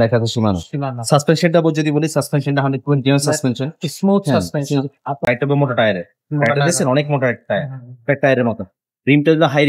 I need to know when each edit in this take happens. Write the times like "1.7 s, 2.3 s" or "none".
5.3 s

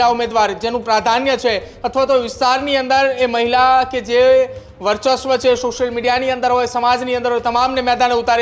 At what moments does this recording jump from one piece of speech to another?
none

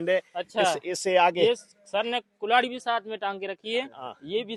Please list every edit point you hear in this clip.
none

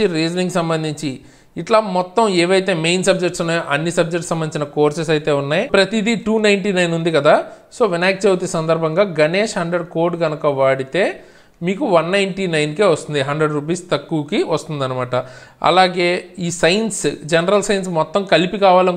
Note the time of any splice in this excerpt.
none

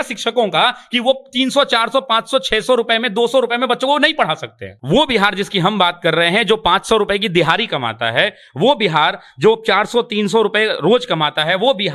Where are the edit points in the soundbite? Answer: 4.7 s

